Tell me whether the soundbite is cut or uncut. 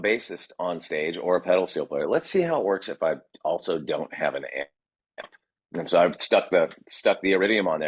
uncut